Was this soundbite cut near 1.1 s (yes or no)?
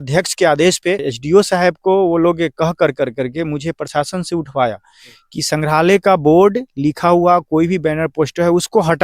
yes